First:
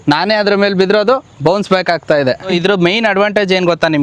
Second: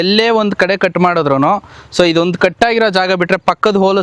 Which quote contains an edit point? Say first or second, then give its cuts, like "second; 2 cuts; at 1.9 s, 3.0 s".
first; 1 cut; at 2.5 s